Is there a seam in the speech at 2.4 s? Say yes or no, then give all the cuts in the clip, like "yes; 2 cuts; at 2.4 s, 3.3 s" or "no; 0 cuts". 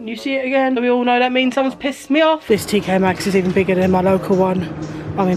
yes; 1 cut; at 2.4 s